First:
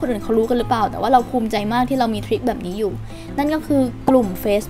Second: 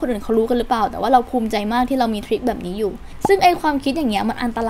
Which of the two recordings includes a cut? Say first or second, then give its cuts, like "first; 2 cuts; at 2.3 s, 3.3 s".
second; 1 cut; at 3.1 s